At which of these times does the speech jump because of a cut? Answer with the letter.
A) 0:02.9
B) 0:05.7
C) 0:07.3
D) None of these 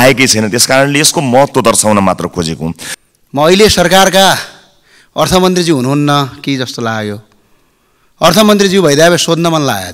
A